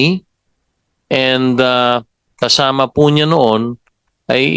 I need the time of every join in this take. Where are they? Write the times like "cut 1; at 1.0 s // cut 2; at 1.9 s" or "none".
none